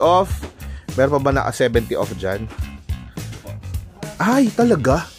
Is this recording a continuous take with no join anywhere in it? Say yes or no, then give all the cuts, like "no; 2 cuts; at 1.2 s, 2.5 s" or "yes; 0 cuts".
yes; 0 cuts